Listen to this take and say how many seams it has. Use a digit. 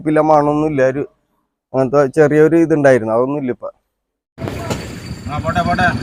1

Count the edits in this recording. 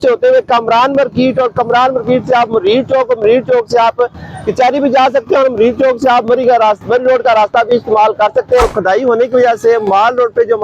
1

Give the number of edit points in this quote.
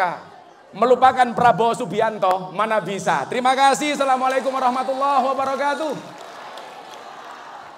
0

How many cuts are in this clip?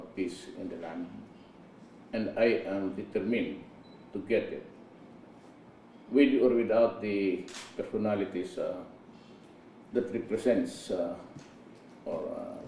1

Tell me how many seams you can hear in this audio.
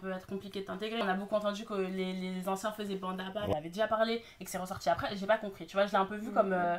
2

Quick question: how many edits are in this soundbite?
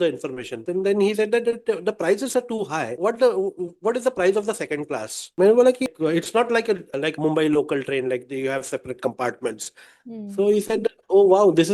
1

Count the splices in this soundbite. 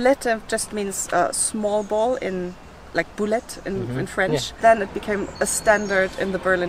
1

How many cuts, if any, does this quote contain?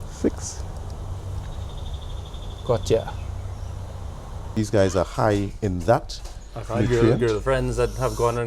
1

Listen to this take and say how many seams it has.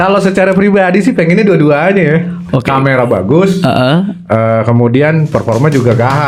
0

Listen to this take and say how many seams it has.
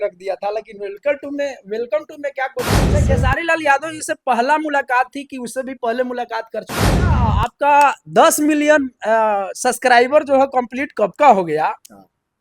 2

